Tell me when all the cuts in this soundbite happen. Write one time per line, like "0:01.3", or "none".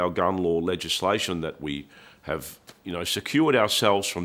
none